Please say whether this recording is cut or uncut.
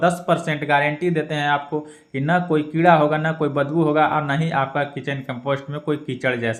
uncut